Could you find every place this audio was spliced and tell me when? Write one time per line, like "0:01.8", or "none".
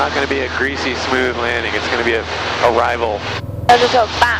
0:03.5